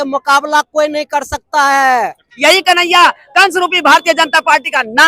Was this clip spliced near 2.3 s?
yes; 1 cut; at 2.3 s

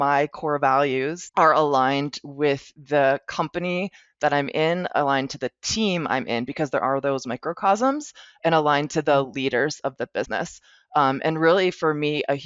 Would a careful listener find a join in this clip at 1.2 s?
yes; 1 cut; at 1.2 s

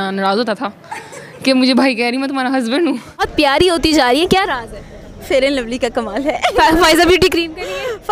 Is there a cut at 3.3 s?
yes; 1 cut; at 3.3 s

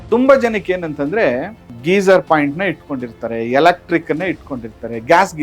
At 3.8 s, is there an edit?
no; 1 cut; at 1.8 s

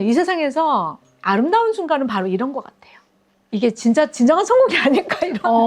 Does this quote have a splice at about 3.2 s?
yes; 1 cut; at 3.2 s

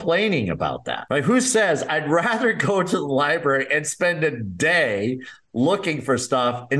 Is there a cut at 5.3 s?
no; 1 cut; at 0.9 s

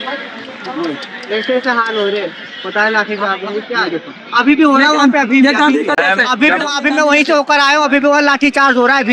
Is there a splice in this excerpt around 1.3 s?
no; 0 cuts

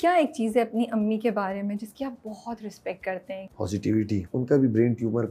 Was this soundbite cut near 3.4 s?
yes; 2 cuts; at 3.4 s, 4.3 s

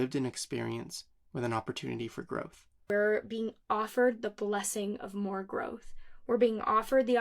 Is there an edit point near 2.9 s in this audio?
yes; 1 cut; at 2.9 s

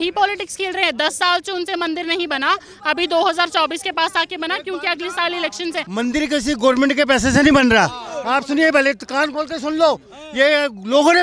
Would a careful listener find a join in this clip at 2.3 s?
no; 1 cut; at 5.8 s

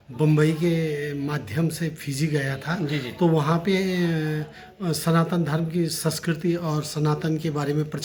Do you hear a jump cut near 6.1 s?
no; 0 cuts

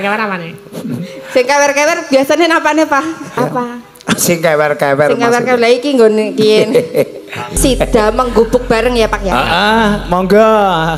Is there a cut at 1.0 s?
no; 2 cuts; at 3.4 s, 7.5 s

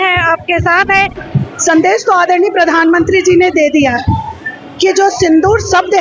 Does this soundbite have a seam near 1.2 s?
yes; 1 cut; at 1.2 s

